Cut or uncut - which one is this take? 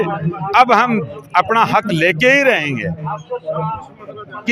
uncut